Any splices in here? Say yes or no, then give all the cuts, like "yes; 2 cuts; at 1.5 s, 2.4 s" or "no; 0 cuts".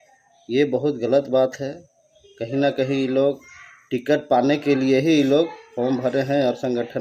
no; 0 cuts